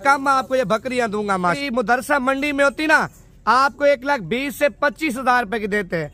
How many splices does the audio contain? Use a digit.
1